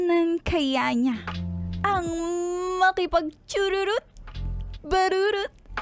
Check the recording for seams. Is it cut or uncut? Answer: uncut